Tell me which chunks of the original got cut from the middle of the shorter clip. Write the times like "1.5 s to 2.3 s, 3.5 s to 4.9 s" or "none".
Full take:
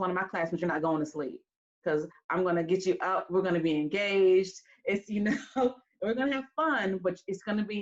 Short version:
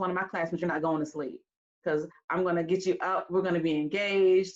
none